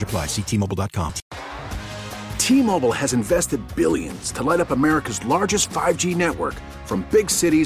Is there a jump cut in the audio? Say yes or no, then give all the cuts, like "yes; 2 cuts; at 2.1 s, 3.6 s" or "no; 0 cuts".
yes; 1 cut; at 1.3 s